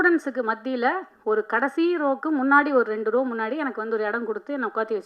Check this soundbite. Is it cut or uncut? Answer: uncut